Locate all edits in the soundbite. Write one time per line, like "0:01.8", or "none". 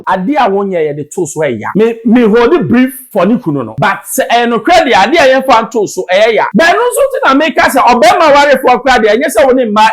0:01.6
0:03.0
0:03.7
0:06.5